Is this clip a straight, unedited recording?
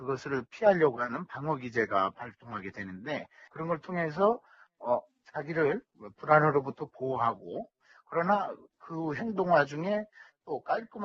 yes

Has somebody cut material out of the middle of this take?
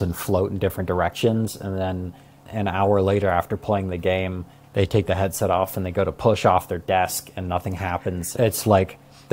yes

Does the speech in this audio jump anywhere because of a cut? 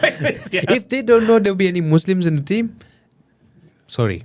no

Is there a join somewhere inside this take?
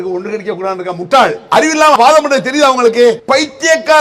yes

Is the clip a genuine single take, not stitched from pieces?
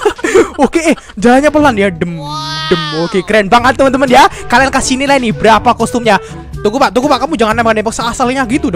no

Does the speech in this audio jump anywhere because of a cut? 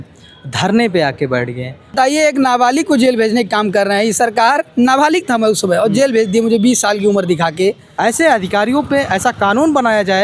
yes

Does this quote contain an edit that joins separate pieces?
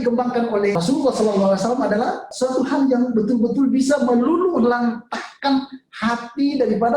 yes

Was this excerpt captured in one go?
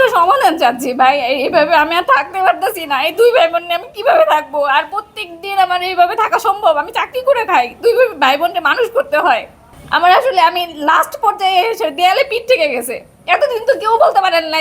yes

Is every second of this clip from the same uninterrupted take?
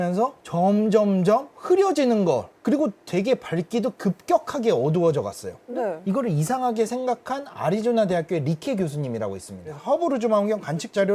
yes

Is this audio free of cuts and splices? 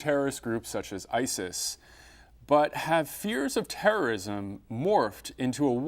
no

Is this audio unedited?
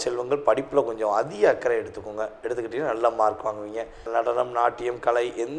no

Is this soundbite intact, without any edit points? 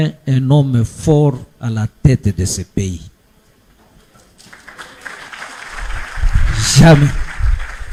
yes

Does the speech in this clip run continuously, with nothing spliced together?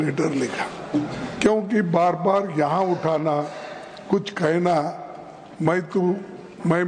yes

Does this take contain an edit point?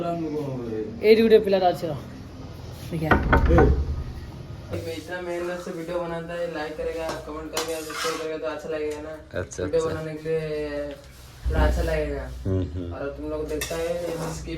yes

